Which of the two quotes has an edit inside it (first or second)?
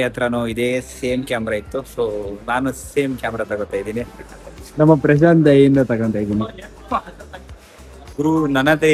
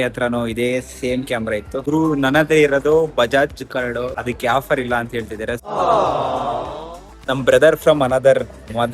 second